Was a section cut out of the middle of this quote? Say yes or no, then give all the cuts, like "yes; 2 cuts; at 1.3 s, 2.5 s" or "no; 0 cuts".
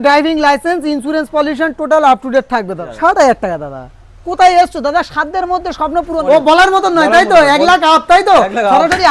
yes; 2 cuts; at 2.8 s, 6.2 s